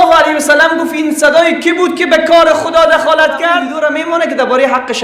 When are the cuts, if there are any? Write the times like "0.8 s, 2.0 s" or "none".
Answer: 3.7 s

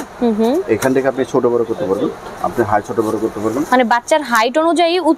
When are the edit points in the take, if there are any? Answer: none

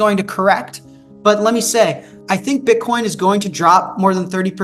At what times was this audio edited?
none

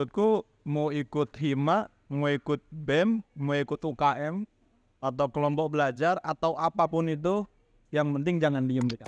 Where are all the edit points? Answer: none

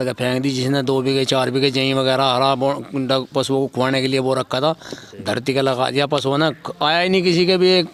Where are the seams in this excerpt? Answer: none

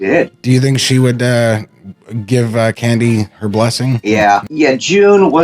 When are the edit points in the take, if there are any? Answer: 4.5 s

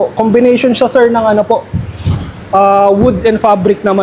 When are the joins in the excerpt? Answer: none

